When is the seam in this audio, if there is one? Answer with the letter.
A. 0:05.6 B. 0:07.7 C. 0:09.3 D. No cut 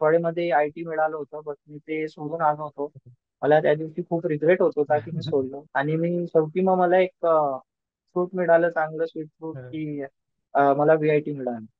A